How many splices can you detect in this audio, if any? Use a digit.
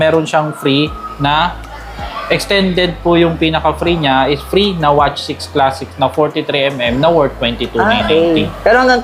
0